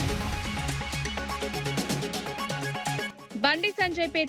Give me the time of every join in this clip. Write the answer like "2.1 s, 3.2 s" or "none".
1.7 s, 3.2 s